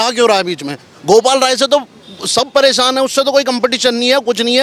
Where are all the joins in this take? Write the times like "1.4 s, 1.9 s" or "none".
none

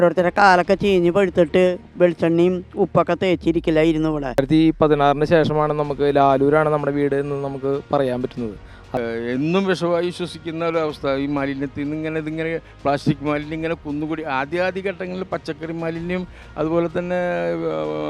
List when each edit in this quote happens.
4.2 s, 9.0 s

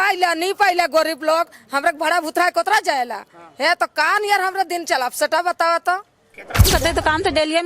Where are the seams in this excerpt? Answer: 6.7 s

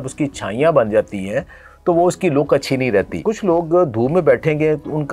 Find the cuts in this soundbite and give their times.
3.1 s

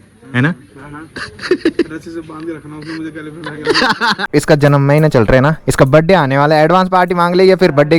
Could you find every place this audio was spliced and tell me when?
4.2 s

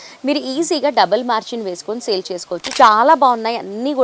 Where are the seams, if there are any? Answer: 2.6 s

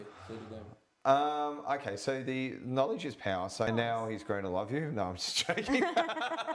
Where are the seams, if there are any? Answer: 3.7 s

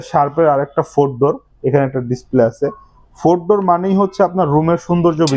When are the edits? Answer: none

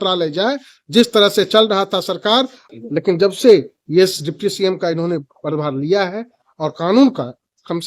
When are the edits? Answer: 2.7 s

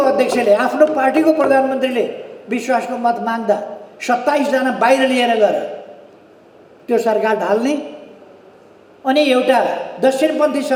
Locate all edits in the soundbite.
none

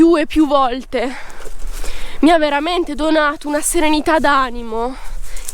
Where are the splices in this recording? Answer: none

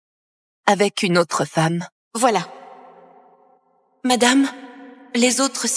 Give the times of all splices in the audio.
2.0 s

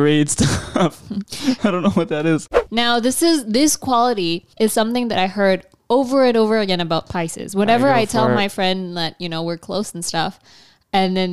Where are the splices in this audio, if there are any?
2.5 s

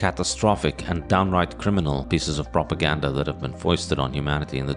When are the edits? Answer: 2.0 s

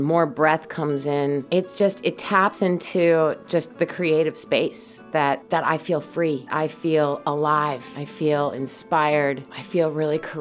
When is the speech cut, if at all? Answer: 1.4 s, 5.4 s, 6.5 s, 8.0 s, 9.6 s

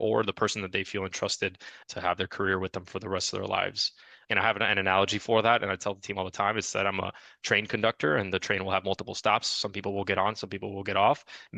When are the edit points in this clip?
1.8 s

